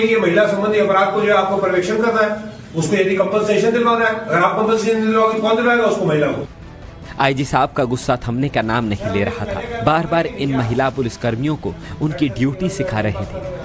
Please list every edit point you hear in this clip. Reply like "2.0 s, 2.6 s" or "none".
12.5 s